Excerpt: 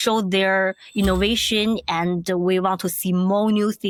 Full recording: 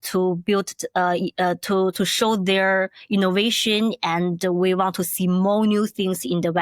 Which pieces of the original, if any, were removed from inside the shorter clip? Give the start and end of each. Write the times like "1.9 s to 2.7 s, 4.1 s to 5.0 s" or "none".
none

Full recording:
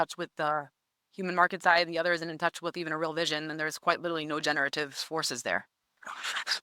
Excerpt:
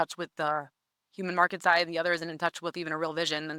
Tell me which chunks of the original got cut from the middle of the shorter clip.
none

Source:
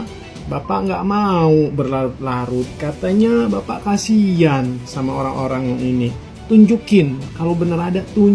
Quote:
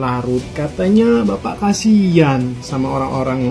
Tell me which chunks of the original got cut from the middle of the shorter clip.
none

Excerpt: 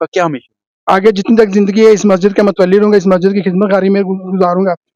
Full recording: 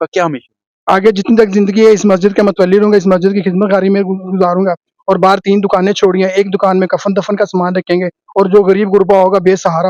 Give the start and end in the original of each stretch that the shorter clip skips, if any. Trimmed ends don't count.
none

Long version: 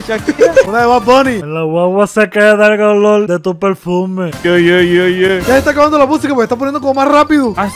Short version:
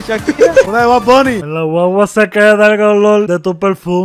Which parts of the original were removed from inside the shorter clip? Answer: none

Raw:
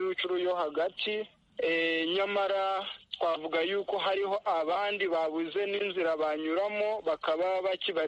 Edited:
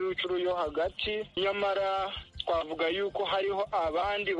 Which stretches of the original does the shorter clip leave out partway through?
1.4 s to 2.1 s

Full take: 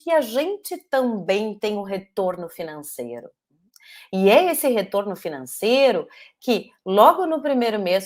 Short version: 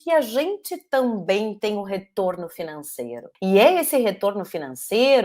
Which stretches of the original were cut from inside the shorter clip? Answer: 3.2 s to 4.0 s

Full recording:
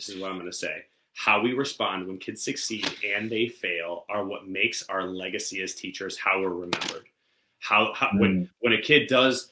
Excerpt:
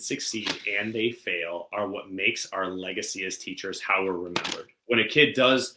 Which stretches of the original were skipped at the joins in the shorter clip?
7.1 s to 8.5 s

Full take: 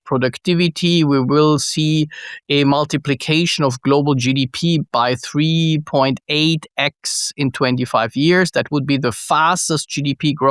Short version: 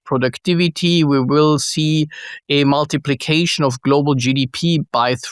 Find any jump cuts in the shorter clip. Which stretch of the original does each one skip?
none

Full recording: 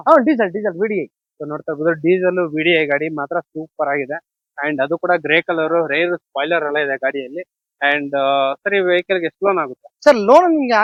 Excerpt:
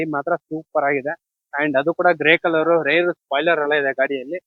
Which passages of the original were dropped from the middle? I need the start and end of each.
none

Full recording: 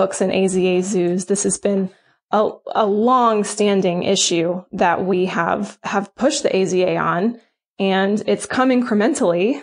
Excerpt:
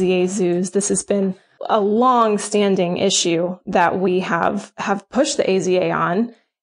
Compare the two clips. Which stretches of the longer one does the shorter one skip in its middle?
2.1 s to 2.6 s

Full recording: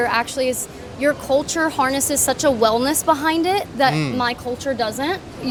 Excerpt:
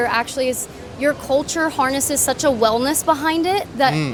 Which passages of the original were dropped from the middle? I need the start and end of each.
none

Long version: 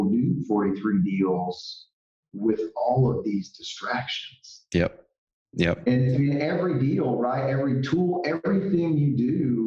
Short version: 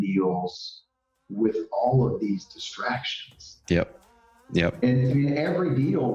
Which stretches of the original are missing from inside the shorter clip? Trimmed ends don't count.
none

